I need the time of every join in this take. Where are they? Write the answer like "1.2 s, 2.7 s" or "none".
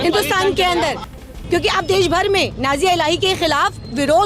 1.3 s